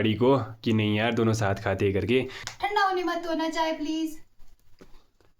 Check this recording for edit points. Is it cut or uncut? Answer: cut